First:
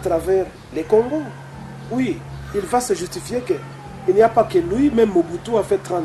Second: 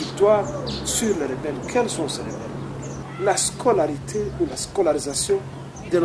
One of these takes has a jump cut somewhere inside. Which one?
second; 1 cut; at 3.0 s

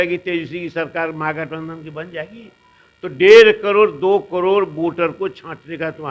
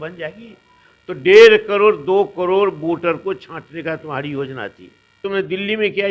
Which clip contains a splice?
second; 1 cut; at 5.2 s

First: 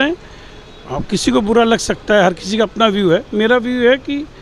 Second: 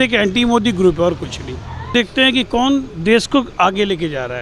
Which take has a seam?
second; 1 cut; at 1.9 s

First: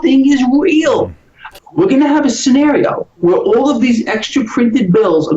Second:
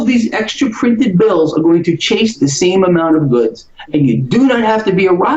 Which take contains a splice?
first; 1 cut; at 1.5 s

